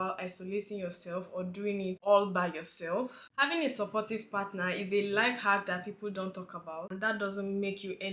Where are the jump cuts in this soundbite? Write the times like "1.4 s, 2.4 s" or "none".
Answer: 3.3 s, 6.9 s

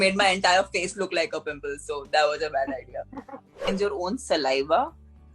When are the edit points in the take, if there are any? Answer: 3.6 s

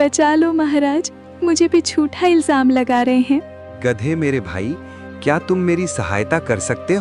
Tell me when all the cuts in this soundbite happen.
3.6 s

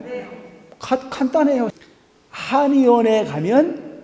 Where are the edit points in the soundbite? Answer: 1.7 s

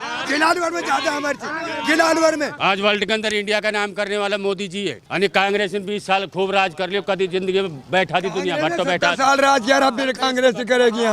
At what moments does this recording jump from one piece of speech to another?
2.5 s, 5.0 s

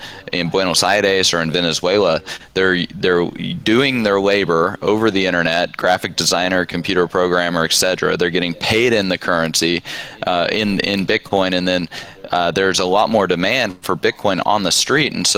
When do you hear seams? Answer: none

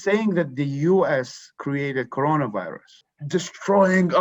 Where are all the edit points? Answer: 3.1 s

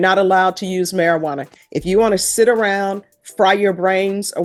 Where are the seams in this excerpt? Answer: none

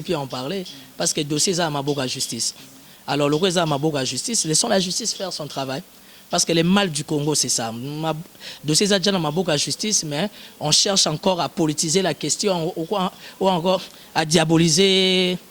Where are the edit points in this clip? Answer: none

